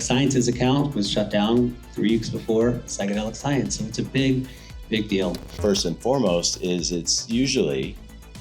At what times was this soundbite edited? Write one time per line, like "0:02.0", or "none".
0:05.5